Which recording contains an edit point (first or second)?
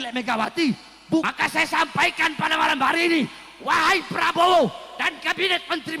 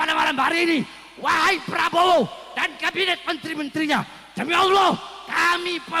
first